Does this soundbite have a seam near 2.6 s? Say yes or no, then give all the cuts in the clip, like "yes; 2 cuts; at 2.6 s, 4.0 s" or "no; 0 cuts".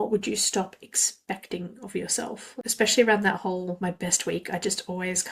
yes; 2 cuts; at 2.6 s, 3.8 s